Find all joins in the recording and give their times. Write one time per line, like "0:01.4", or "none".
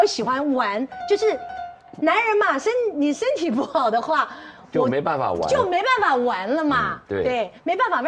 none